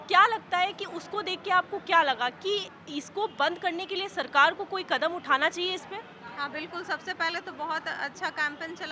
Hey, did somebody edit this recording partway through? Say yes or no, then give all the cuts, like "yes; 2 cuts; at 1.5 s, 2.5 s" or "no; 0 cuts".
no; 0 cuts